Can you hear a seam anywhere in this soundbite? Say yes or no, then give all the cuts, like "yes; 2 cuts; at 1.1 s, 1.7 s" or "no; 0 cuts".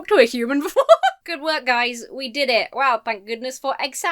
yes; 1 cut; at 1.2 s